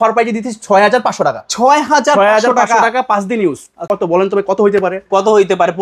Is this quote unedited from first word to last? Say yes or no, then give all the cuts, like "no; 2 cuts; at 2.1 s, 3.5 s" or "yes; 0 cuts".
no; 1 cut; at 3.9 s